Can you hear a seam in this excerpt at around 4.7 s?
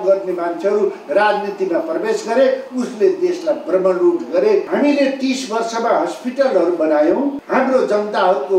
yes; 2 cuts; at 4.7 s, 7.4 s

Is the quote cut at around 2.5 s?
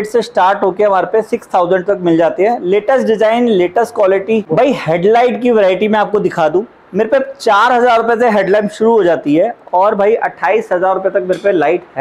no; 0 cuts

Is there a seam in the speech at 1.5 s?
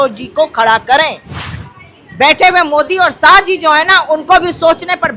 yes; 1 cut; at 1.5 s

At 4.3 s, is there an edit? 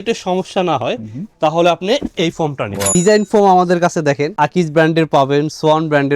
no; 1 cut; at 2.8 s

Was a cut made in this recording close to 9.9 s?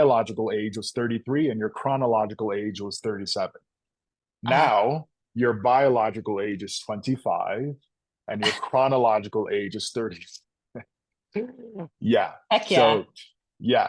no; 0 cuts

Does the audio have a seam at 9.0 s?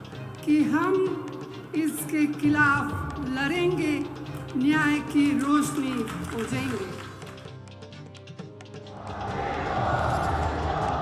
yes; 2 cuts; at 7.5 s, 9.0 s

